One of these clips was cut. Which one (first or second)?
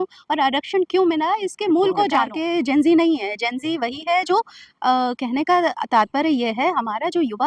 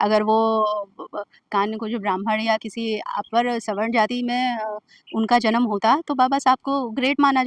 first